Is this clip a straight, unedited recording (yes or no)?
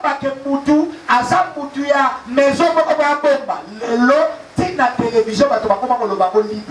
yes